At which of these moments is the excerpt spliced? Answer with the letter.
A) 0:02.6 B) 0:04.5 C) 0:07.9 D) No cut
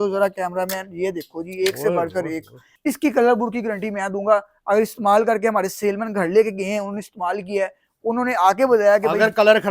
A